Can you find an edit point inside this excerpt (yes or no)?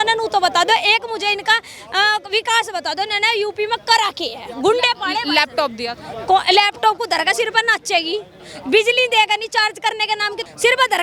no